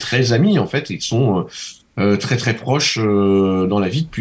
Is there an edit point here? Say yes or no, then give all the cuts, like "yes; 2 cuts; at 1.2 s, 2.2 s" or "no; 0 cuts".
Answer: no; 0 cuts